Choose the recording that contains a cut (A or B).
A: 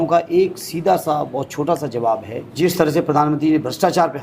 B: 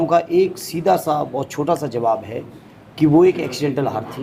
A